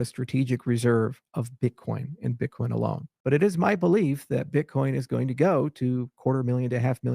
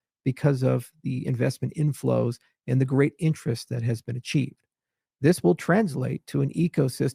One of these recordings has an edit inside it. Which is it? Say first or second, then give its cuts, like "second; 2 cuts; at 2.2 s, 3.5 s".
first; 1 cut; at 3.1 s